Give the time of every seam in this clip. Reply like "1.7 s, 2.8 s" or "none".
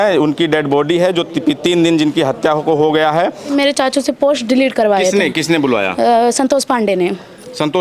3.5 s